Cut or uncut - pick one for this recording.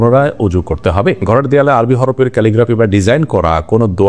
cut